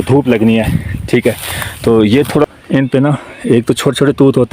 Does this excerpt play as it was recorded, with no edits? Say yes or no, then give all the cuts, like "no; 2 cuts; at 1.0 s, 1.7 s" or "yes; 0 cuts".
no; 1 cut; at 2.4 s